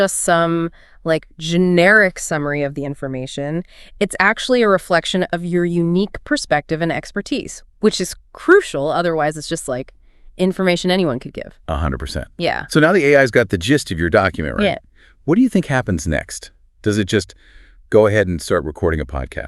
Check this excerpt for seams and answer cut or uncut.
uncut